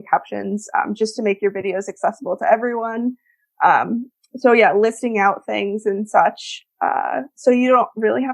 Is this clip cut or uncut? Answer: uncut